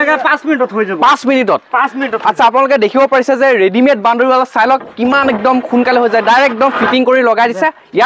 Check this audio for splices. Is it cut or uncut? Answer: uncut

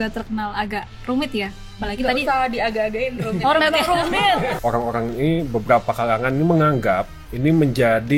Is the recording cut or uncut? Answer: cut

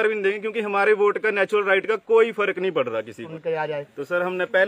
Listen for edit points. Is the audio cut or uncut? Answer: cut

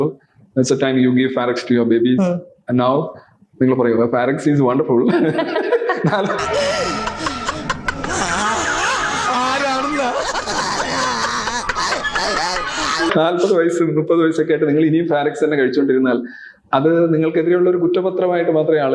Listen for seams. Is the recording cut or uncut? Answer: uncut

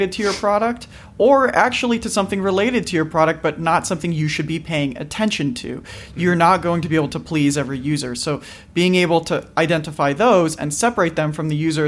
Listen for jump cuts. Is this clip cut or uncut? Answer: uncut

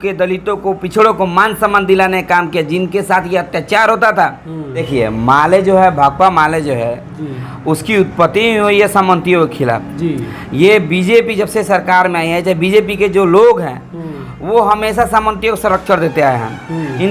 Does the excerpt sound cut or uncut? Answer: cut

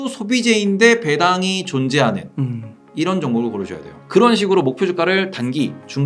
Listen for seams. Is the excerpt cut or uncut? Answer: cut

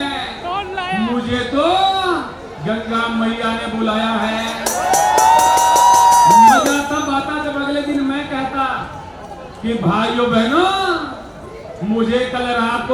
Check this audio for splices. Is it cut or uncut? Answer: uncut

